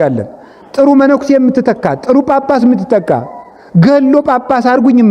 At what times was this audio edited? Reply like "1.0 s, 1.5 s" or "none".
none